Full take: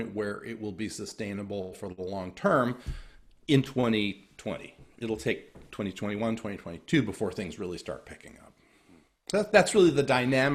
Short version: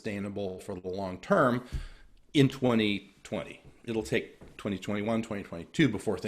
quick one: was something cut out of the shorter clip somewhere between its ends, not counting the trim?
no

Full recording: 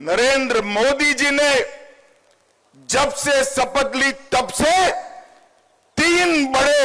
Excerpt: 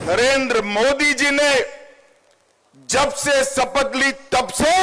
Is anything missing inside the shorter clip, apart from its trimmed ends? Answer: no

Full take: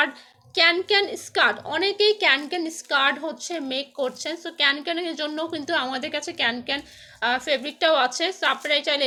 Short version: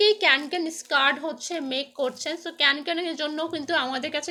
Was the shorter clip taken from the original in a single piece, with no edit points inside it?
yes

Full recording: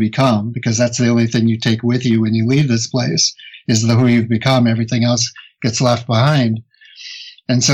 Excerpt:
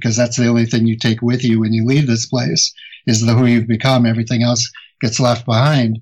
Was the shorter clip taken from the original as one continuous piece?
yes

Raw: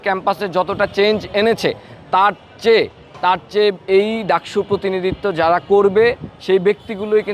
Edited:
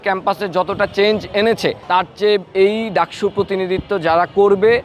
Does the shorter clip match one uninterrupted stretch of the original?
no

